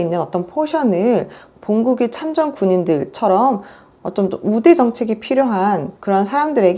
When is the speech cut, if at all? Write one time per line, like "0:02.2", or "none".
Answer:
none

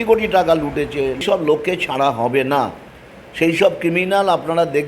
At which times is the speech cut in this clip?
0:01.2

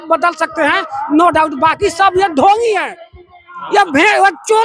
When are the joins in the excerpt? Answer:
none

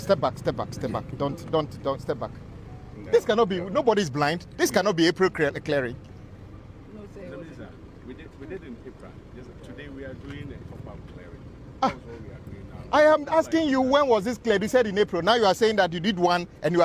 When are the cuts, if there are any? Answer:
none

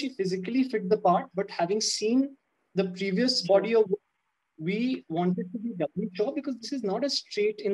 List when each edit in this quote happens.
none

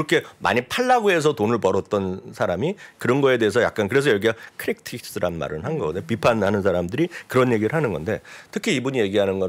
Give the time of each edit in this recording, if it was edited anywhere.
none

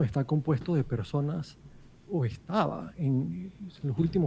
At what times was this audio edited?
none

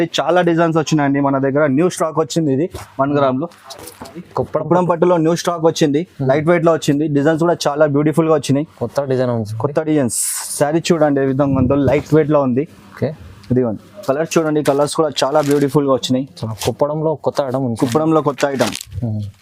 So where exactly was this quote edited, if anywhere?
0:04.3
0:14.0

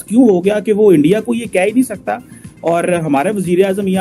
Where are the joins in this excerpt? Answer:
none

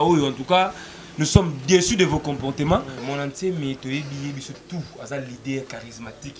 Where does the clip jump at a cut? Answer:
0:03.0

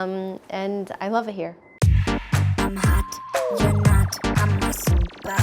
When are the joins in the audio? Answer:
0:01.7

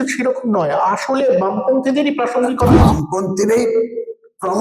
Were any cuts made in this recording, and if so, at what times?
0:02.8

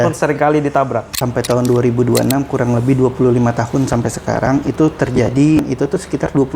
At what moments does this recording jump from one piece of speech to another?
0:01.2
0:05.6

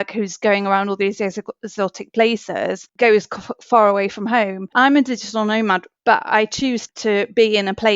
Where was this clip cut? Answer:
0:02.9
0:04.7
0:05.9
0:06.9

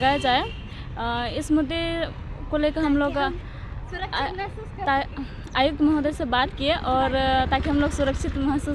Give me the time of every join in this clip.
none

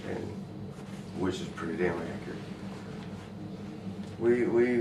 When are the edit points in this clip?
0:03.4

